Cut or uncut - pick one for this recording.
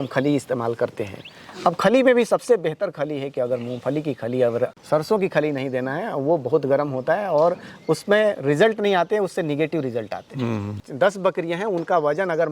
cut